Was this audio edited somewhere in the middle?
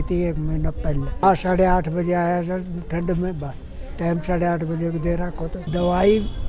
yes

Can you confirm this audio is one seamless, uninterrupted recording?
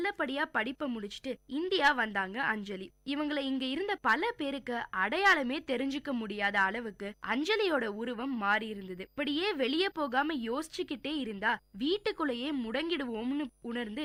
yes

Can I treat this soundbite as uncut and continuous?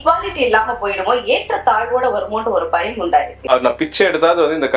no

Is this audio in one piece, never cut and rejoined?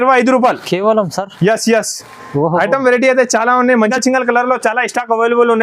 no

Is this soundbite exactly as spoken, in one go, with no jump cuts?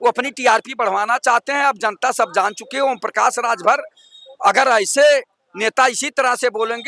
yes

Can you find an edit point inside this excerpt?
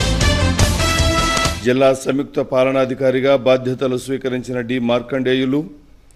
no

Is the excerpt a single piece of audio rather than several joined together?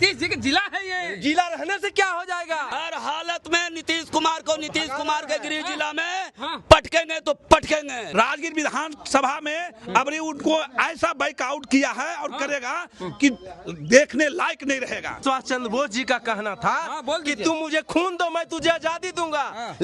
no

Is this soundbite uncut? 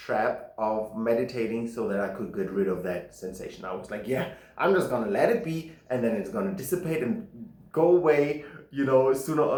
yes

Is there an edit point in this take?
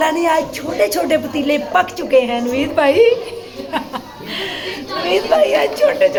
no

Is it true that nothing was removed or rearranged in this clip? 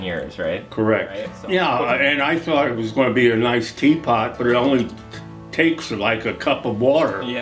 no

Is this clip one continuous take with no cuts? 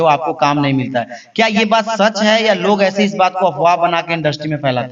yes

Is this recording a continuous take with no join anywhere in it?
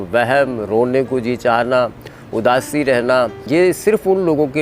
no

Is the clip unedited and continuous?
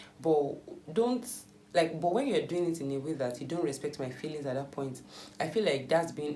yes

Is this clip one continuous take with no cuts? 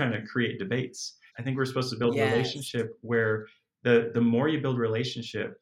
no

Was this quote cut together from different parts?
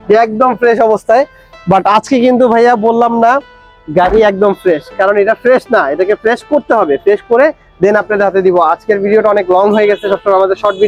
no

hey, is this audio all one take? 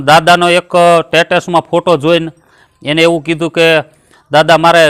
yes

